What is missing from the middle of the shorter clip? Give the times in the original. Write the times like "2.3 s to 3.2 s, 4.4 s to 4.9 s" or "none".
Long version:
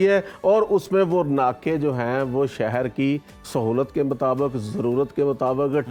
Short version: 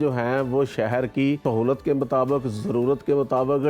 3.2 s to 3.5 s